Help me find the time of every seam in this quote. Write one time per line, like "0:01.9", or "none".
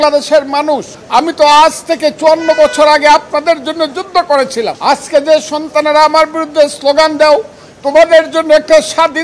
0:00.9
0:04.7